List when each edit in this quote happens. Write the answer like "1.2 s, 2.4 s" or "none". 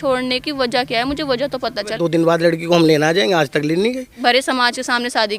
2.0 s, 4.2 s